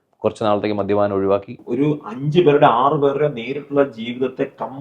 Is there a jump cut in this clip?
yes; 1 cut; at 1.6 s

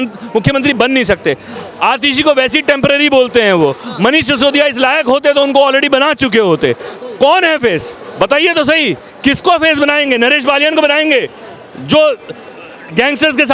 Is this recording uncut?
yes; 0 cuts

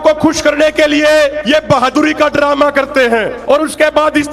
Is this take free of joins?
no; 2 cuts; at 1.4 s, 3.3 s

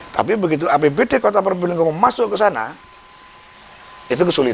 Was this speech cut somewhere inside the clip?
no; 0 cuts

